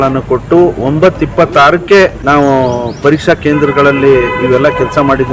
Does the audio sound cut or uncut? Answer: cut